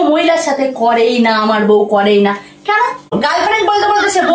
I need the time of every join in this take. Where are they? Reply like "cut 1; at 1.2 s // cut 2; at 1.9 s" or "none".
cut 1; at 3.1 s